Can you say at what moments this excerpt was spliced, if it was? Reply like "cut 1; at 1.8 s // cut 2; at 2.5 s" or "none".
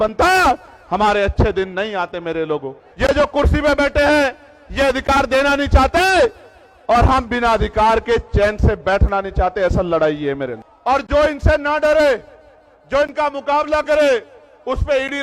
cut 1; at 2.8 s // cut 2; at 10.7 s